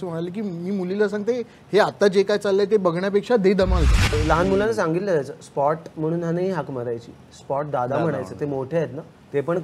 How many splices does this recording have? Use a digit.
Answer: 1